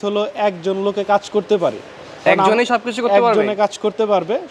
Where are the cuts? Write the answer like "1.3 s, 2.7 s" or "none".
none